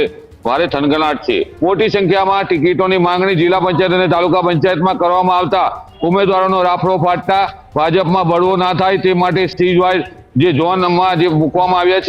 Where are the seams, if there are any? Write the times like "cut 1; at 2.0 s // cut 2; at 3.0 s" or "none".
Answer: cut 1; at 1.5 s